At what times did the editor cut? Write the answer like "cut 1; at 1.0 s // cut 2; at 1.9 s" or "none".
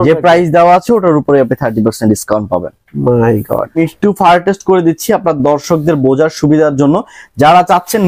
cut 1; at 3.7 s